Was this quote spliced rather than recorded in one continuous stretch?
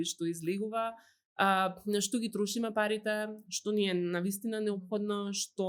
no; 0 cuts

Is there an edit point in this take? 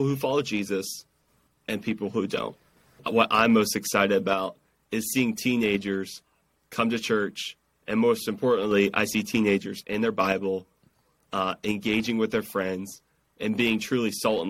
yes; 1 cut; at 3.0 s

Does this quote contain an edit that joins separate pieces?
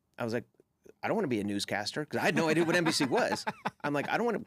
no; 0 cuts

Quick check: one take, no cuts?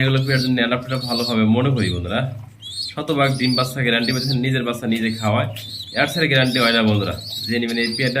yes; 0 cuts

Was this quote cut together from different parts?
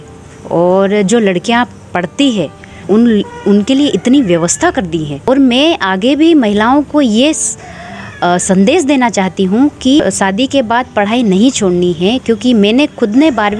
yes; 3 cuts; at 2.8 s, 5.3 s, 10.0 s

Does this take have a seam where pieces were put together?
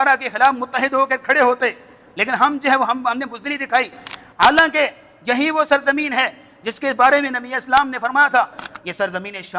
yes; 1 cut; at 8.6 s

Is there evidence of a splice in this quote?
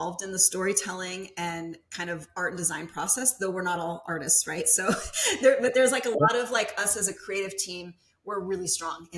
no; 0 cuts

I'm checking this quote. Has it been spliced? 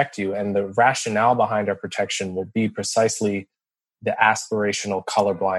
no; 0 cuts

